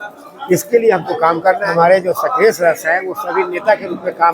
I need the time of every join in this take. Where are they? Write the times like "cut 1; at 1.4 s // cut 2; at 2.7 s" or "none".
cut 1; at 1.7 s